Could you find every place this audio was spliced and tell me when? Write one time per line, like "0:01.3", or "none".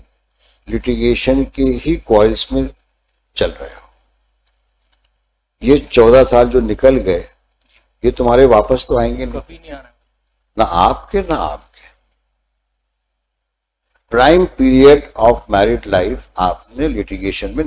none